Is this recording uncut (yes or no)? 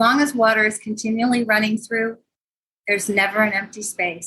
yes